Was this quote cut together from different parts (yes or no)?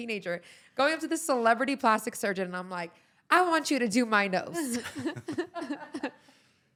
no